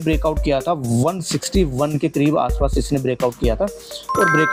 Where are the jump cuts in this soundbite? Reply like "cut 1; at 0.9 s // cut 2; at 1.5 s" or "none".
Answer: none